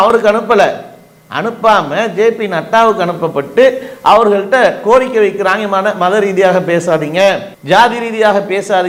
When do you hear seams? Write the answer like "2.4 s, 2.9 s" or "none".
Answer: none